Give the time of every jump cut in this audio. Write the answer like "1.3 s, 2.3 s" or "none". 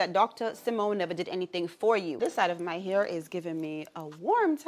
2.1 s